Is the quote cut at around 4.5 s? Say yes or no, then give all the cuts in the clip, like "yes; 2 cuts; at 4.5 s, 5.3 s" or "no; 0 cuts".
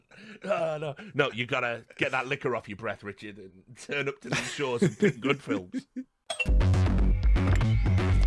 no; 1 cut; at 6.2 s